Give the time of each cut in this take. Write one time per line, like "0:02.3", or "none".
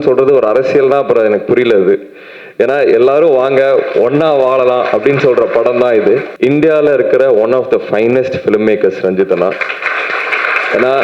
0:06.3